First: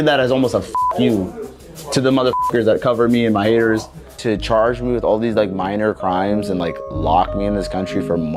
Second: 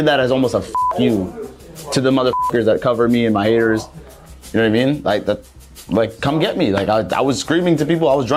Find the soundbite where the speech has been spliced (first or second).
first